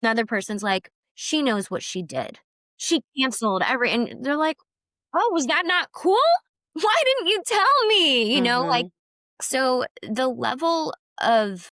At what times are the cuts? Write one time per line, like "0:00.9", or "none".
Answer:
0:02.9
0:06.6